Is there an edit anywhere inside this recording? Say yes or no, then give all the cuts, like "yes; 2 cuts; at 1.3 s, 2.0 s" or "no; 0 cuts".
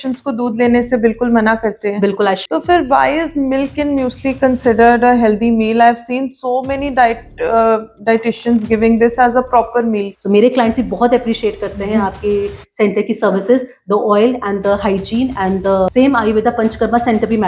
yes; 3 cuts; at 2.4 s, 10.1 s, 15.9 s